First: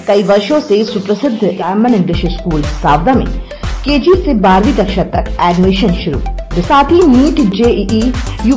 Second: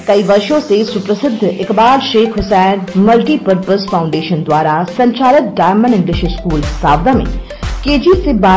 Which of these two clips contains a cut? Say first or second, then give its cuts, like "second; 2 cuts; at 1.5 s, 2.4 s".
first; 2 cuts; at 1.6 s, 6.6 s